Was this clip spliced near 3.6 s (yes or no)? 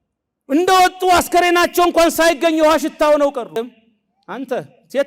yes